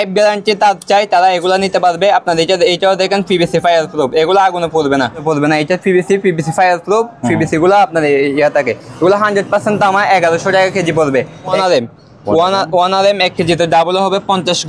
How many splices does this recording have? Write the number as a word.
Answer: two